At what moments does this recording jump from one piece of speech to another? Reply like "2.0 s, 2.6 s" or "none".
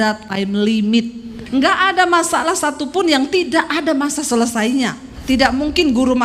1.4 s, 5.1 s